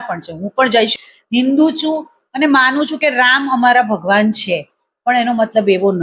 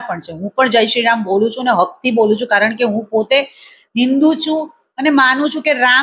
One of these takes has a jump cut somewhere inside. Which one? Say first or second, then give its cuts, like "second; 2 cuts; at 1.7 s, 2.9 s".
first; 1 cut; at 0.9 s